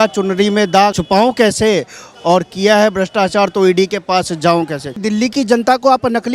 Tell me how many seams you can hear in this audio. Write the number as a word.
two